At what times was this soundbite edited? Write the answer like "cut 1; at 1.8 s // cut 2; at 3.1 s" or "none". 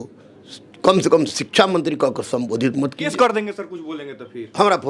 cut 1; at 3.0 s